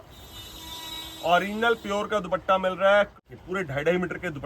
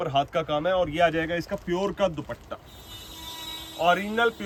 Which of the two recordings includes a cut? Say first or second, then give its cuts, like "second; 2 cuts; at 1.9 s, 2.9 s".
first; 1 cut; at 3.1 s